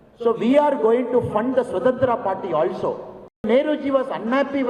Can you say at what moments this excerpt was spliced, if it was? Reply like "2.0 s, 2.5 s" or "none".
3.4 s